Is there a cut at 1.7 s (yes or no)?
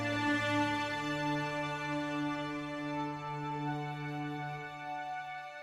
no